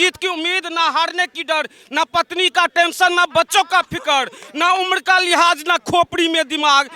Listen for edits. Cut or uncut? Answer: uncut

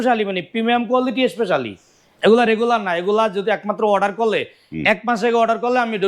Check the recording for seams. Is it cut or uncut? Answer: uncut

